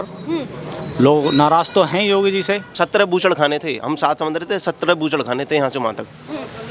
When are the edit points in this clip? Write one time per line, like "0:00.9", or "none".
0:02.7